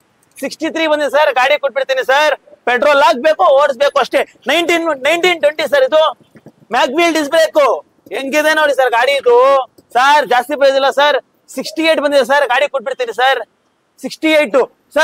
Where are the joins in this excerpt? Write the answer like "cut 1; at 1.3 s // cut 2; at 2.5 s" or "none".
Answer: none